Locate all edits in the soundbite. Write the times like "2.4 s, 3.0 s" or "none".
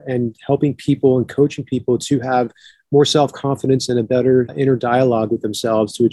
4.5 s